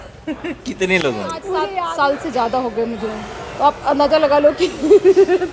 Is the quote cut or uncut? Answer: cut